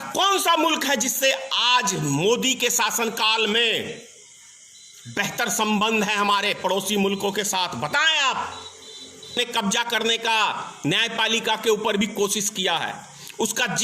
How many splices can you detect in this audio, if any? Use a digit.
1